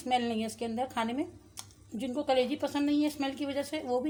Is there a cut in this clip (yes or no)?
no